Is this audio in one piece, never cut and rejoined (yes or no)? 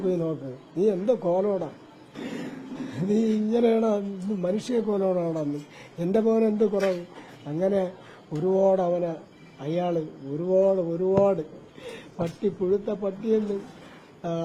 yes